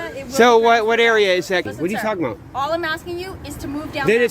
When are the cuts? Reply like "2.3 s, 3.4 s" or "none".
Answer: 1.7 s